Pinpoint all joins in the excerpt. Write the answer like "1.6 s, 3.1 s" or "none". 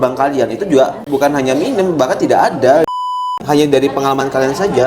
1.0 s, 3.0 s